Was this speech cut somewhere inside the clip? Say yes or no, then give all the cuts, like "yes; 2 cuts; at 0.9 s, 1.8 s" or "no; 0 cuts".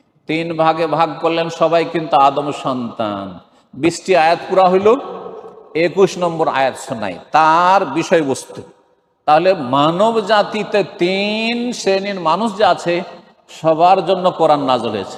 no; 0 cuts